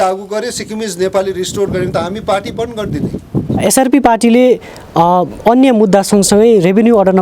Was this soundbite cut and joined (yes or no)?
yes